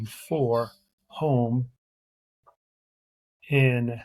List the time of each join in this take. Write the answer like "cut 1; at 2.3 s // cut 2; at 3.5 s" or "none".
none